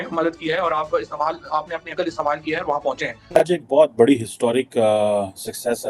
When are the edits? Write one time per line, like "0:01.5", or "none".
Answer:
0:03.2